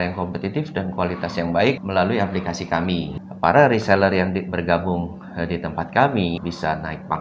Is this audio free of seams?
no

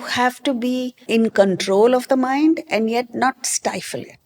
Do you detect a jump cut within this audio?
yes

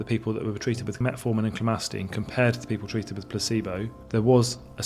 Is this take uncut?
no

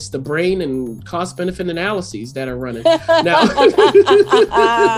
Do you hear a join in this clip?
no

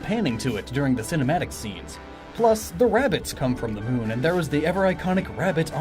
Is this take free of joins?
no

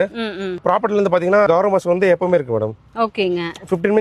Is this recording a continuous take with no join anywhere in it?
yes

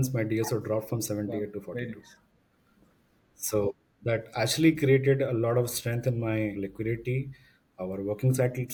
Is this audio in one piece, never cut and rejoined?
yes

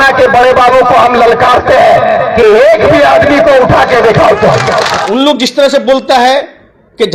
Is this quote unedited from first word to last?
no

